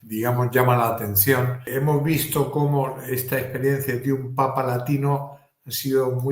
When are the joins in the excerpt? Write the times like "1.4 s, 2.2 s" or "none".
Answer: 1.6 s